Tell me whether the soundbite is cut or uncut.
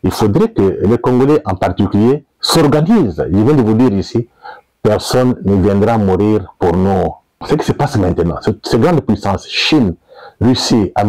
cut